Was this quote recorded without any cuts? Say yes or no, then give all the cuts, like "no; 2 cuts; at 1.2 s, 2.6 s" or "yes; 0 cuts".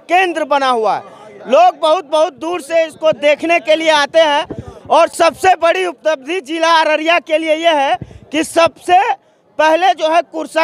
yes; 0 cuts